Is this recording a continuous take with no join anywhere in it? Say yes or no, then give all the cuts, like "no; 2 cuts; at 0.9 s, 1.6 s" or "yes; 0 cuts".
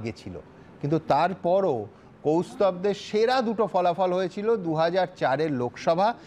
yes; 0 cuts